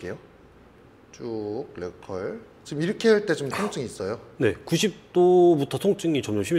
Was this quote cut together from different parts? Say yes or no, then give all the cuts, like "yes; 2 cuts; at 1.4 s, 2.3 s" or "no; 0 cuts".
no; 0 cuts